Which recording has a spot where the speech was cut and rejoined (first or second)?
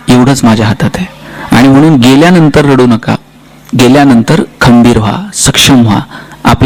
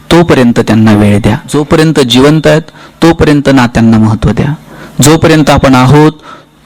second